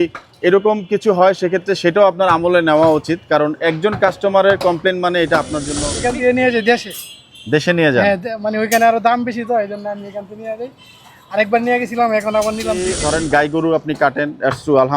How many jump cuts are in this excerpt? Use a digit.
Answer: 2